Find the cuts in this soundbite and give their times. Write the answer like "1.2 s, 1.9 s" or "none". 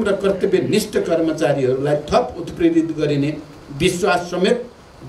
none